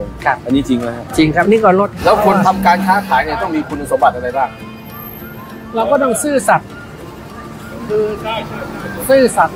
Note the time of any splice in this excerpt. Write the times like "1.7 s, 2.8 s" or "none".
1.9 s